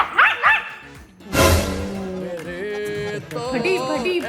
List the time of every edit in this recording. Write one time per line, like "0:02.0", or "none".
none